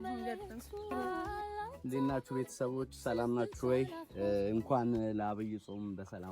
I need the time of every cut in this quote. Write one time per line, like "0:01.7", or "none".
0:00.9